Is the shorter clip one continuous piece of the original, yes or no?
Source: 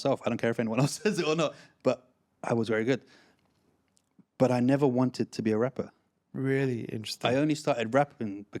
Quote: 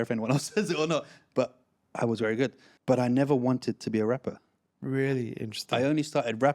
no